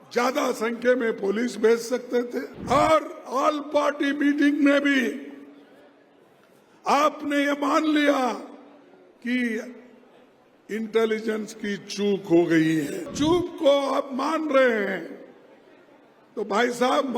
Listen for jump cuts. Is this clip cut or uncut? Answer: cut